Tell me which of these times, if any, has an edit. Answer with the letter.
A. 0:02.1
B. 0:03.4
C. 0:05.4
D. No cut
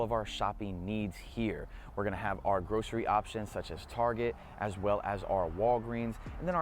D